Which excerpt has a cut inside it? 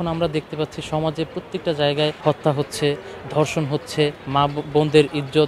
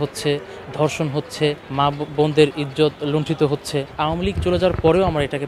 second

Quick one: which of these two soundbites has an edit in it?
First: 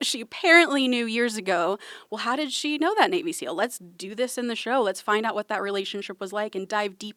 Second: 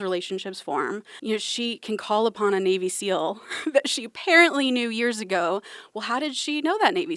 second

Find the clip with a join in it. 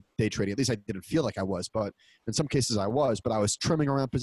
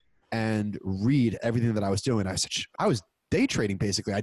second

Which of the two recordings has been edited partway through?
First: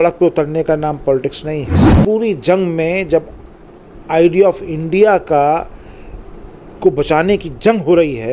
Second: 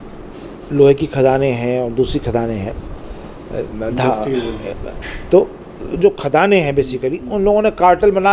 first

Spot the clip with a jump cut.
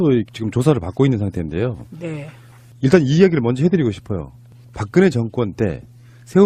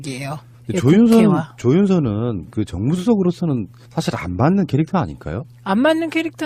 second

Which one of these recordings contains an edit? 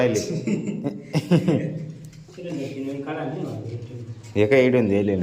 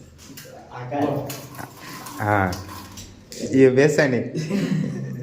second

